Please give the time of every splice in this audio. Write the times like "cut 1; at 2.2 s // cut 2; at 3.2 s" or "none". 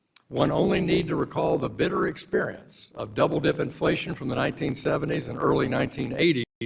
cut 1; at 2.2 s